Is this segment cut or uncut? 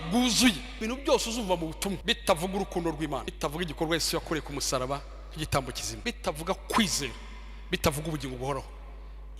cut